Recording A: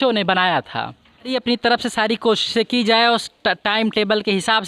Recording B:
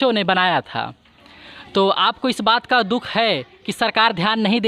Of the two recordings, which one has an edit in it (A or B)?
A